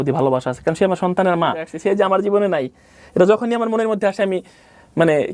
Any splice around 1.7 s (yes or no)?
yes